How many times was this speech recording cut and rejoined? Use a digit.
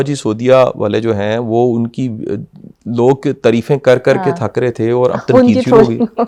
0